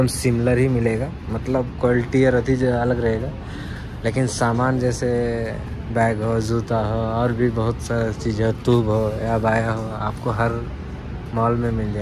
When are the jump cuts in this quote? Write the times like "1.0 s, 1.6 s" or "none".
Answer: none